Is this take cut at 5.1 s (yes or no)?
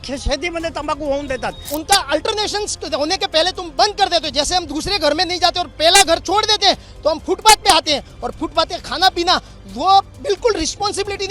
no